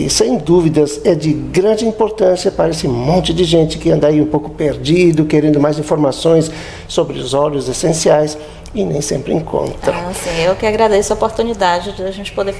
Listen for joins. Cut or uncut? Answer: cut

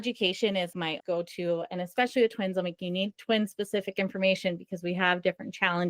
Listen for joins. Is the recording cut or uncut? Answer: cut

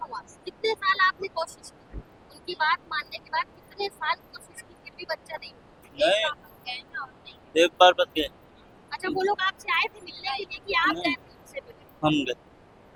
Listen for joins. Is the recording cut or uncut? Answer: uncut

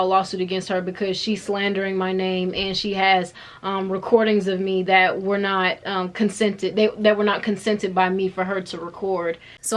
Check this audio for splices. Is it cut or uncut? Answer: uncut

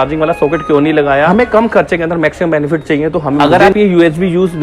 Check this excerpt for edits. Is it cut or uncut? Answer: cut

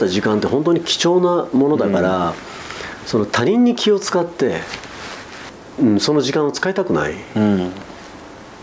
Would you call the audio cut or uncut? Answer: uncut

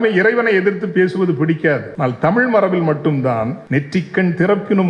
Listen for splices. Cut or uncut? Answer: cut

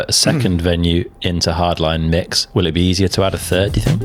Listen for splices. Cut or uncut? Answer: uncut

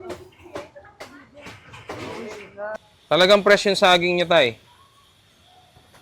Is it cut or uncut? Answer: cut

